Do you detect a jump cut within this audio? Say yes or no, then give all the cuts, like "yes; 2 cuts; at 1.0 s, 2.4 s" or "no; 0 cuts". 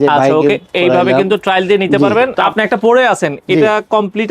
yes; 1 cut; at 2.3 s